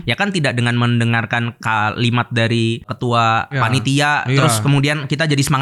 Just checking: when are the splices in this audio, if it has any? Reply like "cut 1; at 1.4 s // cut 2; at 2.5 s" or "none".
none